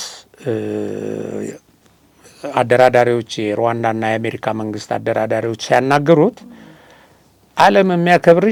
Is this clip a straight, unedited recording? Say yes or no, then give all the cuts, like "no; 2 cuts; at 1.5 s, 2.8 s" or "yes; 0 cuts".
yes; 0 cuts